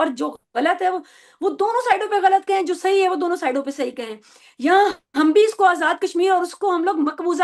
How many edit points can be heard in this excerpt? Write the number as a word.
zero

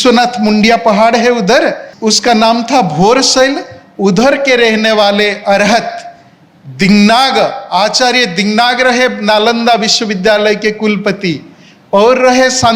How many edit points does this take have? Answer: one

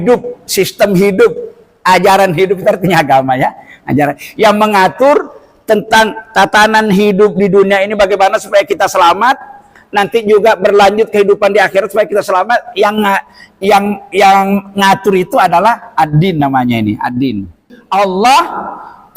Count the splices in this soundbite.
one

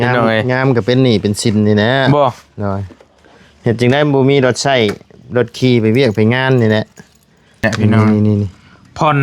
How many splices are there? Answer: one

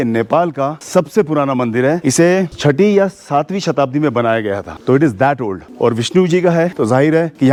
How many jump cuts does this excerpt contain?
zero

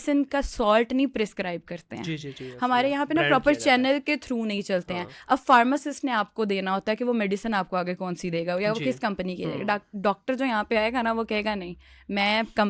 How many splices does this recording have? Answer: zero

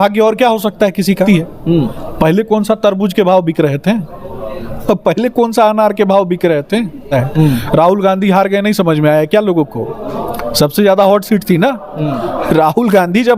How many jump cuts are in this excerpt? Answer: two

